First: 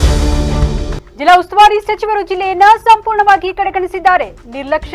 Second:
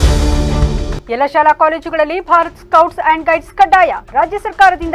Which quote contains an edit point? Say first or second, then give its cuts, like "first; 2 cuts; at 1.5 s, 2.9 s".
first; 1 cut; at 1.0 s